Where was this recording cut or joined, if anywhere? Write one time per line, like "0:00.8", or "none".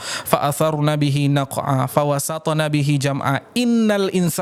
none